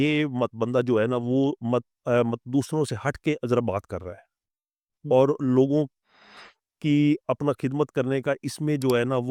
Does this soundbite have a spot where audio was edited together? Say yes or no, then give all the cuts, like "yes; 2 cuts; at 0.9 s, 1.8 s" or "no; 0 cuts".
no; 0 cuts